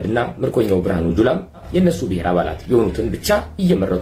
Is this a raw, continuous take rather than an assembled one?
no; 1 cut; at 1.7 s

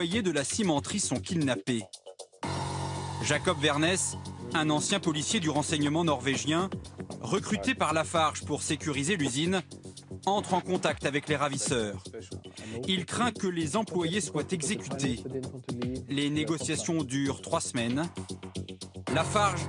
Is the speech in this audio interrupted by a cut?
no; 0 cuts

